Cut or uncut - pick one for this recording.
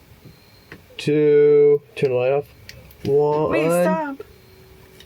uncut